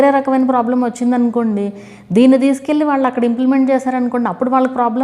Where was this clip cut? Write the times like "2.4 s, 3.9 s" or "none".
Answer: none